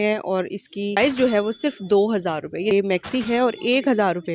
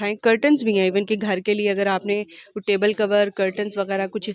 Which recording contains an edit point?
first; 2 cuts; at 1.0 s, 2.8 s

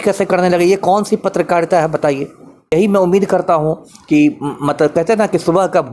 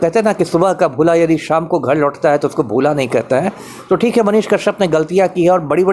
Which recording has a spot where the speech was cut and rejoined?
first; 1 cut; at 2.7 s

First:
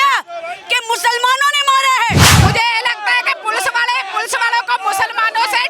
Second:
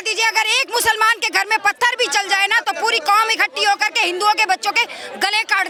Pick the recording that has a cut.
first; 1 cut; at 2.3 s

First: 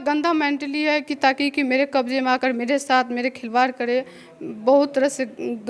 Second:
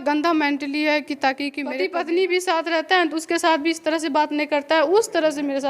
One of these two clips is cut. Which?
second; 1 cut; at 1.6 s

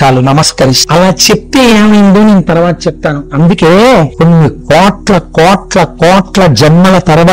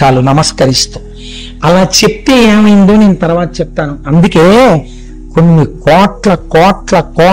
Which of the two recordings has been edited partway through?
first; 2 cuts; at 0.8 s, 4.1 s

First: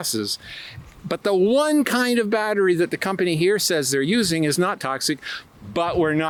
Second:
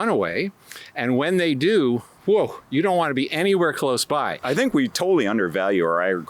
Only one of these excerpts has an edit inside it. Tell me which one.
second; 1 cut; at 4.3 s

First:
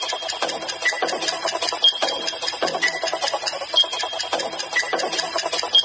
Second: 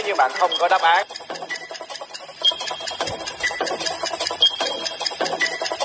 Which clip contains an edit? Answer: second; 1 cut; at 1.1 s

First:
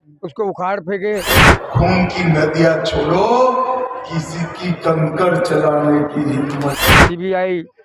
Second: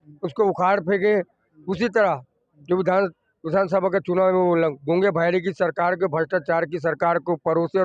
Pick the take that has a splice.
first; 2 cuts; at 1.4 s, 6.8 s

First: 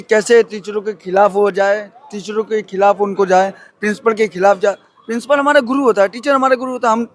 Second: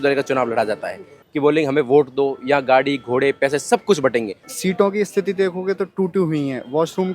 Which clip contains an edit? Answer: second; 2 cuts; at 1.2 s, 4.4 s

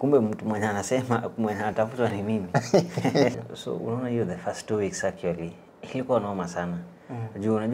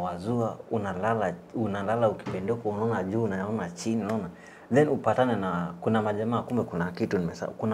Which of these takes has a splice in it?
first; 1 cut; at 3.3 s

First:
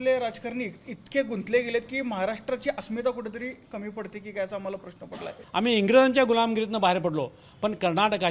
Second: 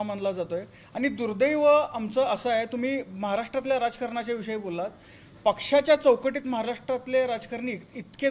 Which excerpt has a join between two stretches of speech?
first; 1 cut; at 5.4 s

